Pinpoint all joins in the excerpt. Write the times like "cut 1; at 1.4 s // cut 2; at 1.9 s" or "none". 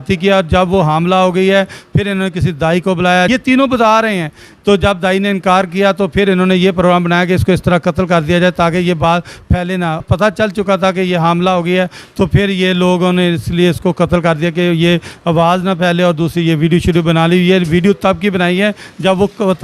cut 1; at 3.3 s // cut 2; at 10.0 s